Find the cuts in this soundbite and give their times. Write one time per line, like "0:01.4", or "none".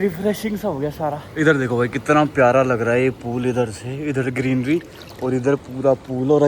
0:01.2